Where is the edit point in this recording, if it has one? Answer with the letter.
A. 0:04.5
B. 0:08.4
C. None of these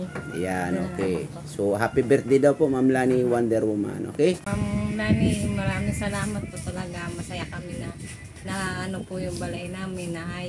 A